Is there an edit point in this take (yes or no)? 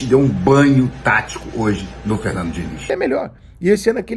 yes